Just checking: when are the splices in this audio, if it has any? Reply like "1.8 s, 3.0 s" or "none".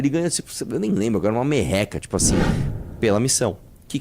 2.6 s